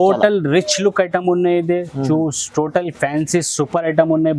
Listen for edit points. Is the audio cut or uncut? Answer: uncut